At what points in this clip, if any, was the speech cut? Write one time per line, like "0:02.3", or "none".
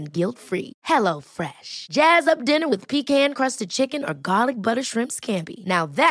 none